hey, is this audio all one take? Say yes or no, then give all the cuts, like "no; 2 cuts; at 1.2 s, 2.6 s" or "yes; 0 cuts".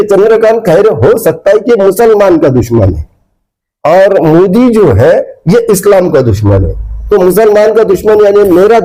yes; 0 cuts